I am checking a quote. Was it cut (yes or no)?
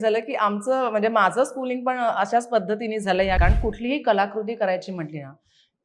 yes